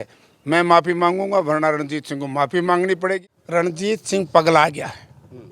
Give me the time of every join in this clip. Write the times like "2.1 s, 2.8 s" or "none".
3.2 s